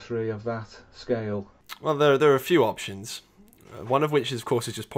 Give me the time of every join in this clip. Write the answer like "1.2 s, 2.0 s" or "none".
1.7 s